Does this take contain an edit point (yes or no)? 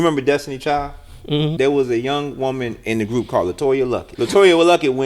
yes